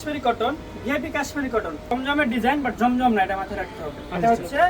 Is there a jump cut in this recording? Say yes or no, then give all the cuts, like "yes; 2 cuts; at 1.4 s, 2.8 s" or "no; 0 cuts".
yes; 1 cut; at 1.9 s